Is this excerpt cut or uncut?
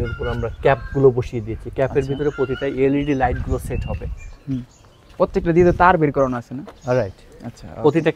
uncut